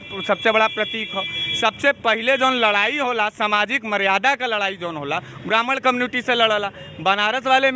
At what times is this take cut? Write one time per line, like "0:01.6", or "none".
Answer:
none